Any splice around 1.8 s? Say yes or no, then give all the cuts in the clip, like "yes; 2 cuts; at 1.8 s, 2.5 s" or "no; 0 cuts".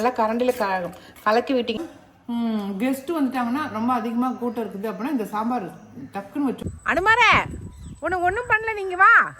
yes; 2 cuts; at 1.8 s, 6.6 s